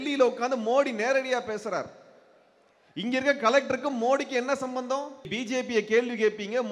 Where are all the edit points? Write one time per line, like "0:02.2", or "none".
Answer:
0:05.3